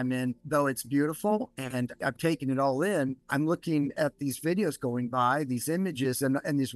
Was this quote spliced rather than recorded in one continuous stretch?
no; 0 cuts

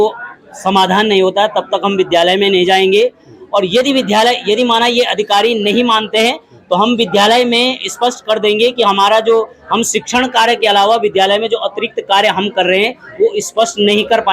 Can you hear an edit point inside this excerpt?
no; 0 cuts

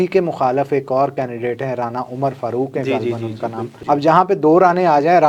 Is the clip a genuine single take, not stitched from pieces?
no; 1 cut; at 3.7 s

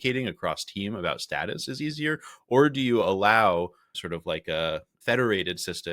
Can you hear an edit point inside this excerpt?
yes; 2 cuts; at 3.9 s, 4.9 s

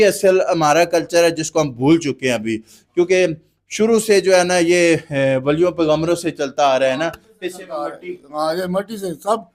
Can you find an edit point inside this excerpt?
no; 0 cuts

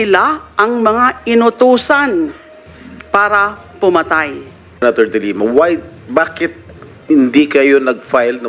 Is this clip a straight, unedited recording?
no; 1 cut; at 4.7 s

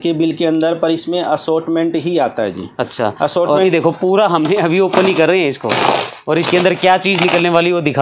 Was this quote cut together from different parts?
yes; 1 cut; at 3.7 s

